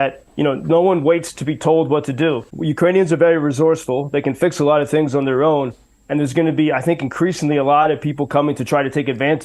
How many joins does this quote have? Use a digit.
1